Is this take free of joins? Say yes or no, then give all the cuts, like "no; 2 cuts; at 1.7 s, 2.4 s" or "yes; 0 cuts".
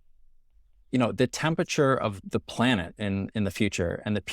no; 1 cut; at 2.2 s